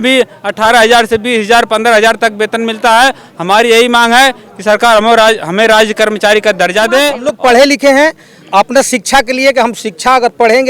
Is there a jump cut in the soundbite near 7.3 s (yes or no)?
yes